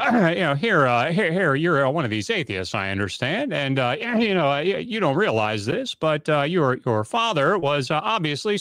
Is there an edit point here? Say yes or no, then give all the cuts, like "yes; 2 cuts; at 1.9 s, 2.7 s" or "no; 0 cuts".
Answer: no; 0 cuts